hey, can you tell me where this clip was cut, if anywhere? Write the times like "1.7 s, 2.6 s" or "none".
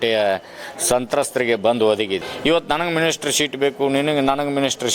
2.3 s